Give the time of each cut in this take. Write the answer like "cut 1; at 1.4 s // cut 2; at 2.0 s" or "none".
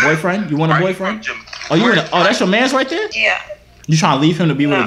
cut 1; at 3.2 s